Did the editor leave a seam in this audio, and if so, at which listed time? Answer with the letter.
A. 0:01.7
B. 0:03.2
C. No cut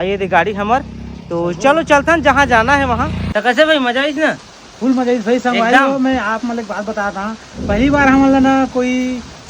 B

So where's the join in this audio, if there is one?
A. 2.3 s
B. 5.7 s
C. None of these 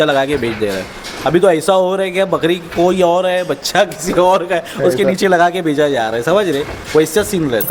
C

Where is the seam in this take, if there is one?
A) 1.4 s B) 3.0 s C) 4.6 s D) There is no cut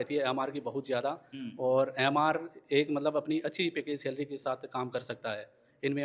D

